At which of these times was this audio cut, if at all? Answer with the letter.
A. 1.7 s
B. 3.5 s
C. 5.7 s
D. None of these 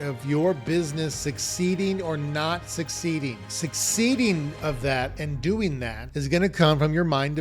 B